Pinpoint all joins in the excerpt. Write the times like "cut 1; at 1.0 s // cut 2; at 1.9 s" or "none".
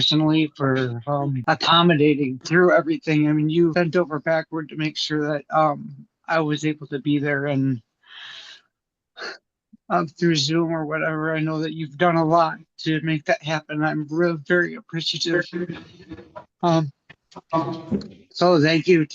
cut 1; at 1.4 s // cut 2; at 2.4 s // cut 3; at 3.7 s

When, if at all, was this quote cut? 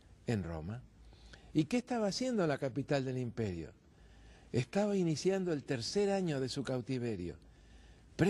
cut 1; at 5.1 s

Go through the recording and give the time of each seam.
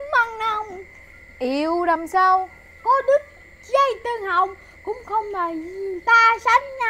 none

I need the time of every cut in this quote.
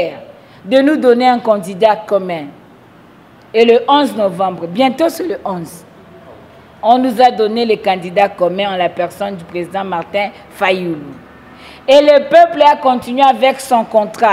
none

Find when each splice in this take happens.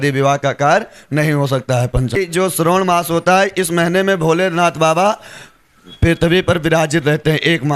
cut 1; at 2.2 s

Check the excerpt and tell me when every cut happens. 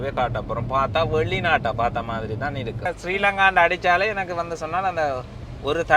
cut 1; at 3.0 s

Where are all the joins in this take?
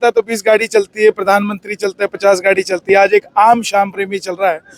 none

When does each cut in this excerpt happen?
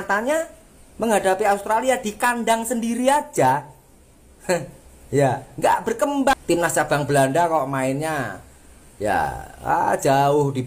cut 1; at 6.3 s

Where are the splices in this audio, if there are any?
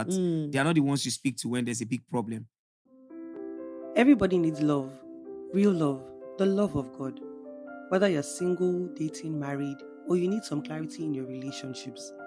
cut 1; at 2.6 s

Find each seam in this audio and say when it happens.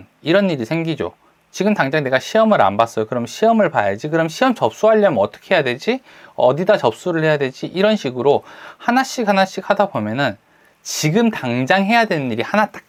none

